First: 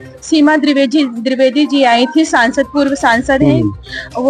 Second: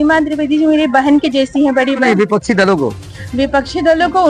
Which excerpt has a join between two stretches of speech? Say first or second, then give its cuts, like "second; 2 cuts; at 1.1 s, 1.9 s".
second; 1 cut; at 2.0 s